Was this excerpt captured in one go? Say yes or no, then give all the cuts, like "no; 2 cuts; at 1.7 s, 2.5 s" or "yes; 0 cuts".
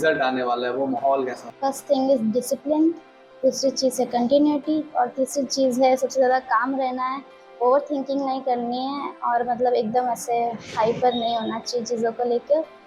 no; 1 cut; at 1.4 s